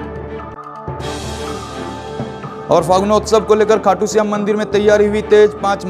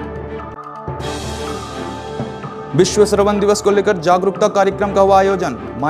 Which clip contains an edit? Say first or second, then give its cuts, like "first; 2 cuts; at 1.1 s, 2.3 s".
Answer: first; 1 cut; at 2.4 s